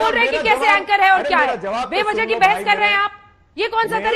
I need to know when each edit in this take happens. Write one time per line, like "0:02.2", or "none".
none